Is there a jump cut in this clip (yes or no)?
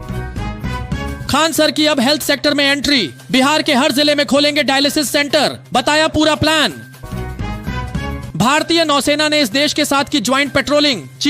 no